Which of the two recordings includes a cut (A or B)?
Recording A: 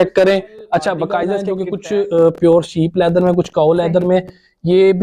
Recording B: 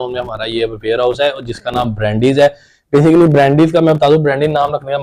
A